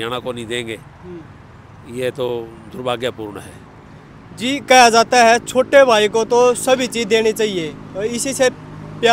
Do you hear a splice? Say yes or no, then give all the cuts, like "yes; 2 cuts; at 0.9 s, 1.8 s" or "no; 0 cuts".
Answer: no; 0 cuts